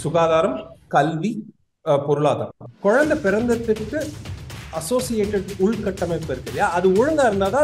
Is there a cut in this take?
yes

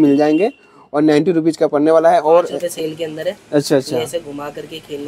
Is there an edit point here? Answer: yes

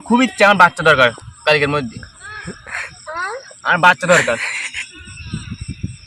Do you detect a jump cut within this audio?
no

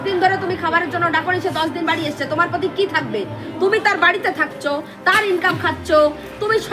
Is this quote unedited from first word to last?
yes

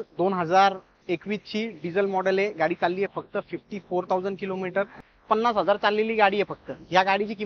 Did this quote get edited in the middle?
yes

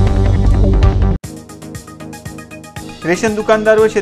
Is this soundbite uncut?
yes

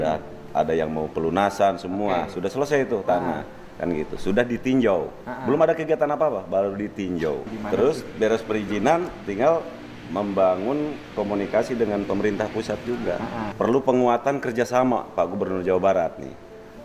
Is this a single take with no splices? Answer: no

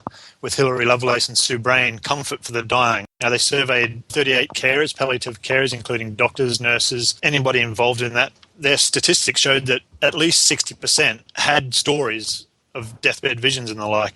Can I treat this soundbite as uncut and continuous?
no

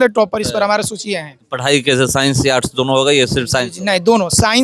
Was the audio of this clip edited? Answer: no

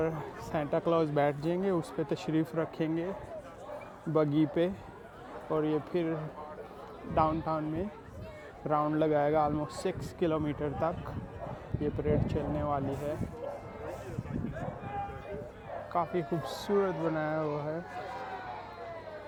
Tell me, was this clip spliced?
no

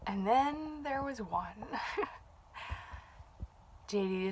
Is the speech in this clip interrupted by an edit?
no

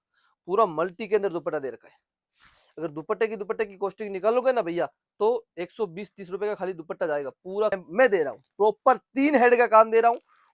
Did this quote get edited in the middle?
yes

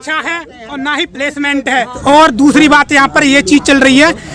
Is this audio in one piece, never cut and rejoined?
no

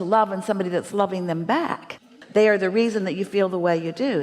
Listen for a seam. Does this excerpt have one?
yes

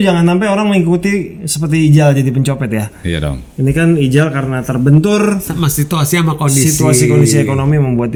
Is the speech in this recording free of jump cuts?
yes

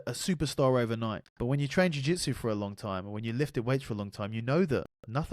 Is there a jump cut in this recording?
yes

